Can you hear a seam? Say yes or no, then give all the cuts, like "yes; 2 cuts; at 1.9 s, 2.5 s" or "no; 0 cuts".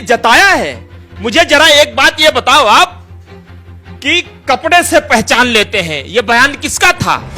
no; 0 cuts